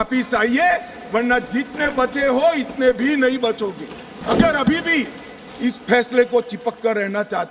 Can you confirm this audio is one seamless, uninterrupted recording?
no; 1 cut; at 4.2 s

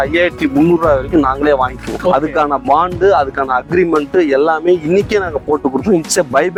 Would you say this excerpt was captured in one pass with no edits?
yes; 0 cuts

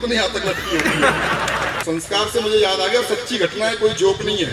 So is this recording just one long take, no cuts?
no; 1 cut; at 1.8 s

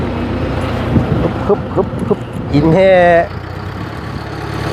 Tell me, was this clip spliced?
yes; 1 cut; at 2.4 s

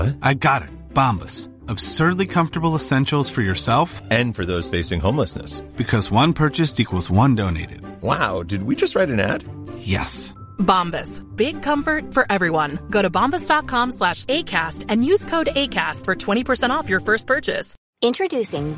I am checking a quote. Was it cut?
yes; 1 cut; at 17.8 s

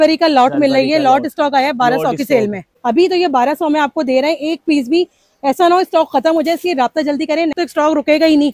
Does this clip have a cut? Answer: yes; 2 cuts; at 2.7 s, 7.5 s

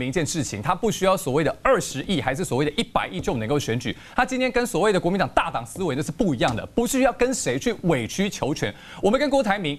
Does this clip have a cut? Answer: no; 0 cuts

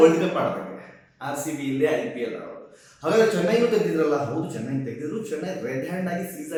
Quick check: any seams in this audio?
no; 0 cuts

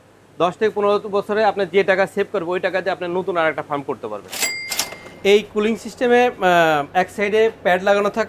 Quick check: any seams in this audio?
yes; 1 cut; at 4.7 s

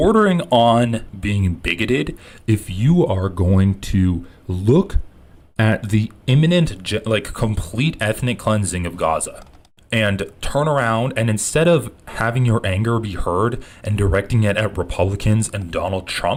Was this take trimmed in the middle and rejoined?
no; 0 cuts

